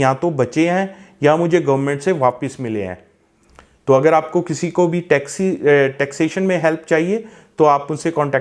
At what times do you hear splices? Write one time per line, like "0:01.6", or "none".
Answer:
none